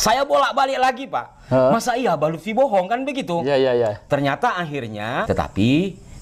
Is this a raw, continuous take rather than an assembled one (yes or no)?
no